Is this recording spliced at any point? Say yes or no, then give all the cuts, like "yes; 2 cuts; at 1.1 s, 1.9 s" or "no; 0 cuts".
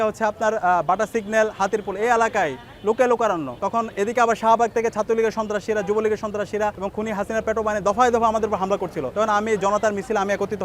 no; 0 cuts